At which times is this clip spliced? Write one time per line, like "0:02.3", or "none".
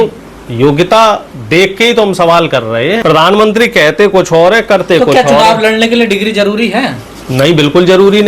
0:03.0